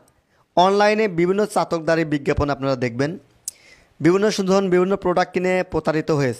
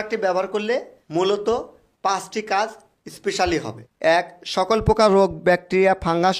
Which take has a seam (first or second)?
second